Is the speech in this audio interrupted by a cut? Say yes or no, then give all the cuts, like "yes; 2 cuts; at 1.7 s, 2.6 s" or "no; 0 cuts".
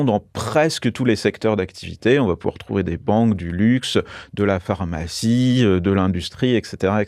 no; 0 cuts